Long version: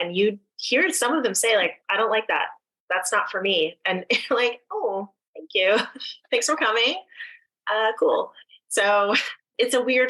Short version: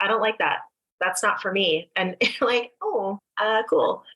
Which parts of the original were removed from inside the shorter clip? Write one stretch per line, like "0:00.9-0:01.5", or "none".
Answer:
0:05.1-0:07.5